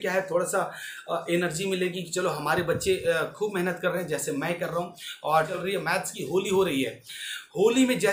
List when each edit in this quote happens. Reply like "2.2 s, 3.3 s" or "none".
5.5 s